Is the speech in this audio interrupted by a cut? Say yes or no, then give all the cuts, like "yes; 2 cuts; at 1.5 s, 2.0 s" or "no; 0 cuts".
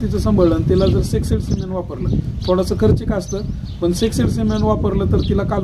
no; 0 cuts